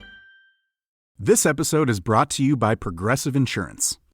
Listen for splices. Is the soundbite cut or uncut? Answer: cut